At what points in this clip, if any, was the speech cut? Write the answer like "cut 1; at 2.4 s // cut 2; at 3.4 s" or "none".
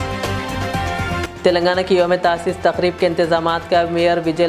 cut 1; at 1.3 s

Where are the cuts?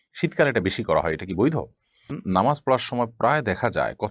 cut 1; at 2.2 s

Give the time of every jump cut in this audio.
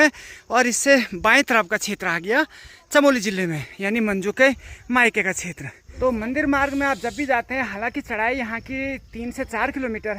none

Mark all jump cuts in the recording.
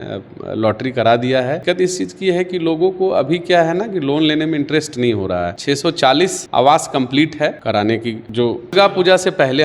cut 1; at 1.6 s // cut 2; at 5.6 s // cut 3; at 7.6 s // cut 4; at 8.7 s

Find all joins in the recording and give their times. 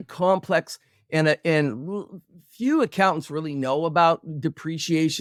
none

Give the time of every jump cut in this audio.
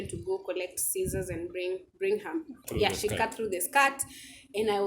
cut 1; at 2.6 s

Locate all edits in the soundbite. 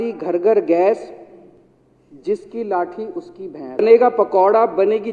none

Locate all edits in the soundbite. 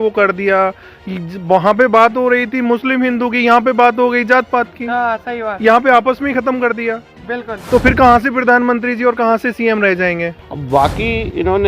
cut 1; at 10.4 s

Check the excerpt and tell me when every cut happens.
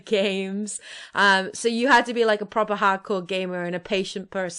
none

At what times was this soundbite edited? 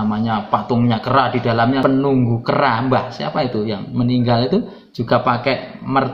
cut 1; at 1.8 s

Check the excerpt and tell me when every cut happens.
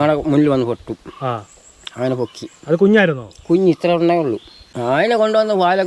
cut 1; at 4.7 s

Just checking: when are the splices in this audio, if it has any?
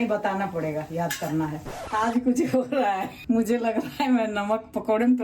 cut 1; at 1.8 s // cut 2; at 3.1 s

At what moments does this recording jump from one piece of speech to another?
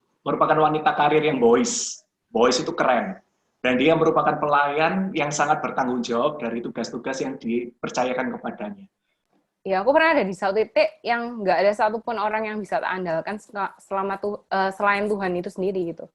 cut 1; at 9.2 s

